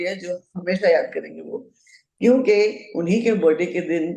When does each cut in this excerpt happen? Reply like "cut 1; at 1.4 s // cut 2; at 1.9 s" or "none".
none